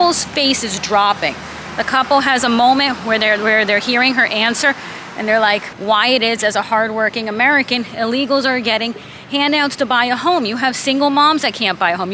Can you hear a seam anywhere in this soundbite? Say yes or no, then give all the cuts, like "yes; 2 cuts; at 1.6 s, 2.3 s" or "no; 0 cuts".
yes; 1 cut; at 5.7 s